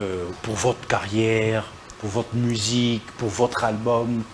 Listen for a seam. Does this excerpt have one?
no; 0 cuts

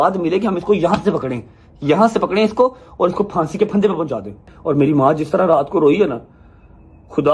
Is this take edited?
yes; 1 cut; at 4.5 s

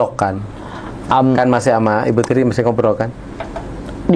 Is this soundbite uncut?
yes; 0 cuts

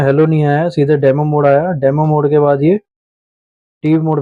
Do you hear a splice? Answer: no; 0 cuts

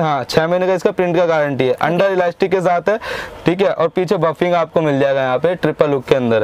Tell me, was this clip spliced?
no; 0 cuts

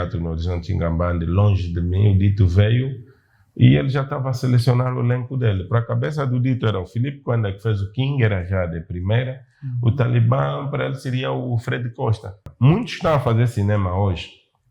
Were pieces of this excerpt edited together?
yes; 1 cut; at 12.4 s

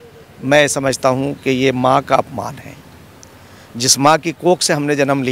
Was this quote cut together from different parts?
no; 0 cuts

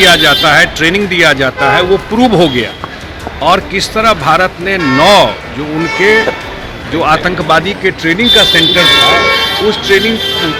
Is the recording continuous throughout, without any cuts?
yes; 0 cuts

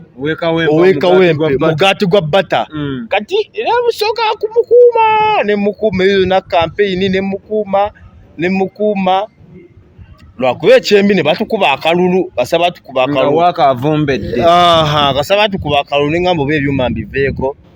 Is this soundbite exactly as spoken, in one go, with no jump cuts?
yes; 0 cuts

